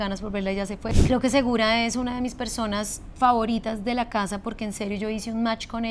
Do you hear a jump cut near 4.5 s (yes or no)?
no